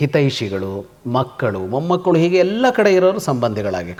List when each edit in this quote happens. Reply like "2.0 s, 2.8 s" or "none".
none